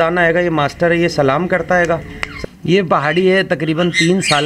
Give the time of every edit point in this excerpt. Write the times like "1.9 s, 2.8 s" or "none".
2.2 s